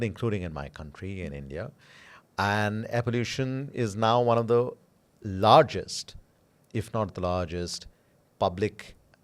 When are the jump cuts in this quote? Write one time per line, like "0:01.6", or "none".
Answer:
none